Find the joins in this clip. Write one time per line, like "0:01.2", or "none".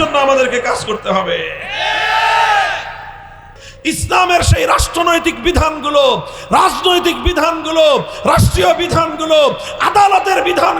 0:03.6

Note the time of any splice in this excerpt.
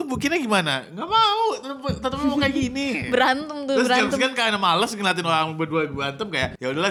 none

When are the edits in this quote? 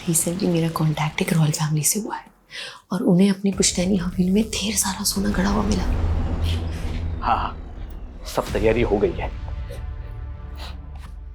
0:06.0

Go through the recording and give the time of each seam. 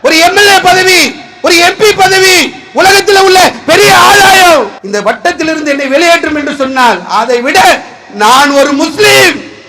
0:04.8

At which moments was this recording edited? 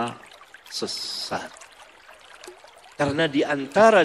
0:01.5
0:02.9

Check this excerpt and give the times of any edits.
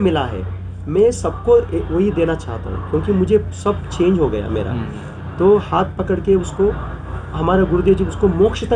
none

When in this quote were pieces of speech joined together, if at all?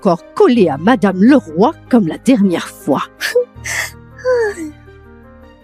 none

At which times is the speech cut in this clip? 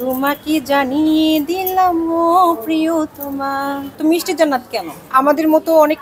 0:03.9

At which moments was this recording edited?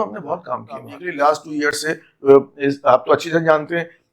0:01.0

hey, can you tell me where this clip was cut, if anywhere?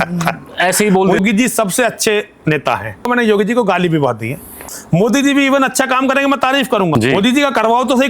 0:01.2
0:03.1
0:04.6
0:06.9

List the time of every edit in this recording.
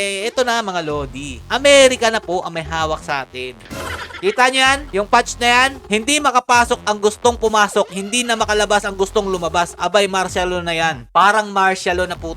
0:03.6
0:04.8
0:05.8
0:11.0

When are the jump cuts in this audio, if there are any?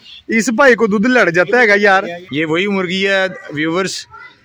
0:02.2

